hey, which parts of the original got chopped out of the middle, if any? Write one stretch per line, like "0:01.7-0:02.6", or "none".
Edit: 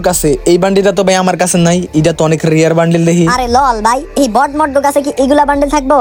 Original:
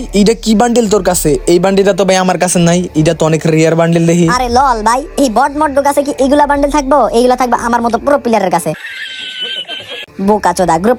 none